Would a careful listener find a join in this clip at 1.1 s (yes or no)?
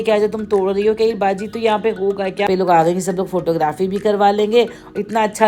no